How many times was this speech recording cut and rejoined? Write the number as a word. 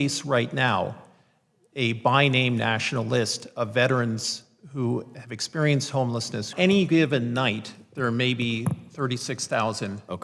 one